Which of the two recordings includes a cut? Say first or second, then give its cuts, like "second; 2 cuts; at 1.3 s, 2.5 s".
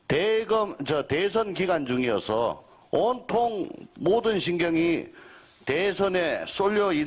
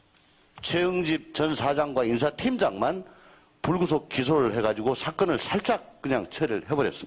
second; 1 cut; at 3.0 s